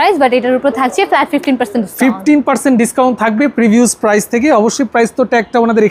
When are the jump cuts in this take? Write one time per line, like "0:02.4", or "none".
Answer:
none